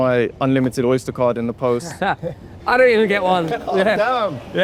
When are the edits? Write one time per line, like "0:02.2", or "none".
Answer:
none